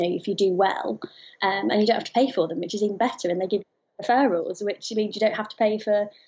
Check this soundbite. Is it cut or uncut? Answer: uncut